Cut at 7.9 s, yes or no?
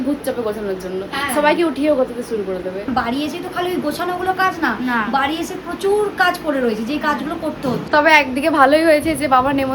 yes